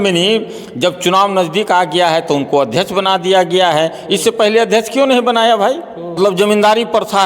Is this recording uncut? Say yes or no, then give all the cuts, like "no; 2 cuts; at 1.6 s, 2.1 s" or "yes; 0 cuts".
no; 1 cut; at 6.2 s